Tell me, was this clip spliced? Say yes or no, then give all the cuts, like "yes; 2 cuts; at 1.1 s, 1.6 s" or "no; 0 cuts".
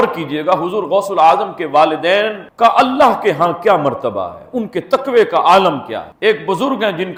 no; 0 cuts